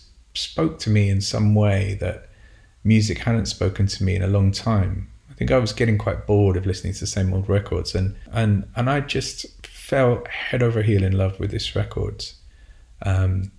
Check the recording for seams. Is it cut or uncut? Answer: cut